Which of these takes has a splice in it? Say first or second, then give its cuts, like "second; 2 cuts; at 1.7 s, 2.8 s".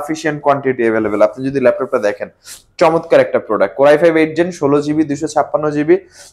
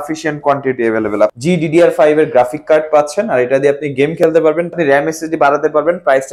second; 2 cuts; at 1.4 s, 4.7 s